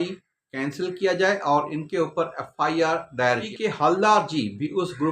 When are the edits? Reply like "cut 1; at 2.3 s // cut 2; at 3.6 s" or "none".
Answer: cut 1; at 3.5 s